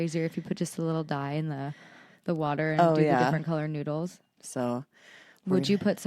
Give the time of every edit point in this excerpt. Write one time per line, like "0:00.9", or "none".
0:04.3

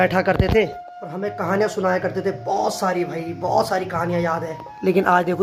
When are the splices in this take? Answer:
none

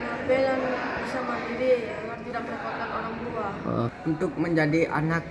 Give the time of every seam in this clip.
0:04.0

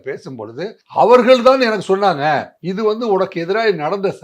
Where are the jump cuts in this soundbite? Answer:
0:02.6

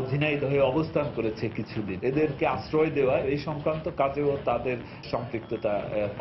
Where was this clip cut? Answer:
0:03.2
0:05.0

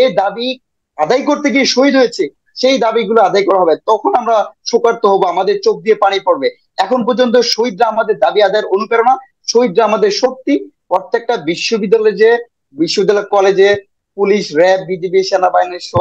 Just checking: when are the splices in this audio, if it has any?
0:10.7

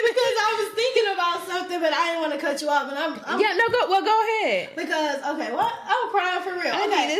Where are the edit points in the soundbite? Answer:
none

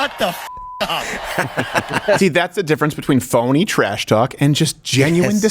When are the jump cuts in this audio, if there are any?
0:02.2

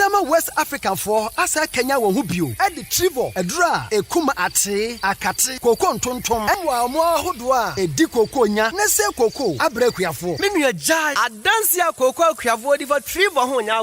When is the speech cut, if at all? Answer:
0:06.6

